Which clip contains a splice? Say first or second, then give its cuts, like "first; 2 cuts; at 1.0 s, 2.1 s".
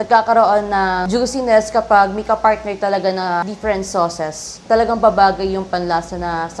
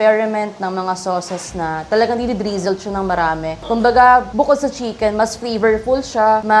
first; 3 cuts; at 1.0 s, 3.4 s, 4.6 s